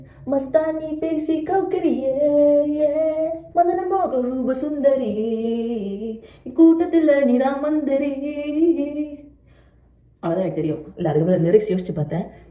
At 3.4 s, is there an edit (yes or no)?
yes